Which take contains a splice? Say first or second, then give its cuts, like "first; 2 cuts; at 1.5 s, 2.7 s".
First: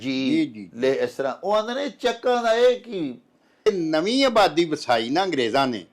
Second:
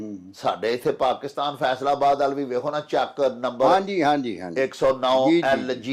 first; 1 cut; at 3.7 s